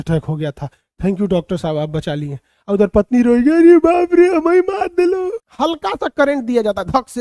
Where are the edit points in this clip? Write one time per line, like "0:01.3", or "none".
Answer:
0:05.4